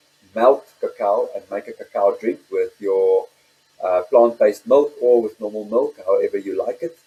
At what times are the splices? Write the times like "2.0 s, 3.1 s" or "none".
none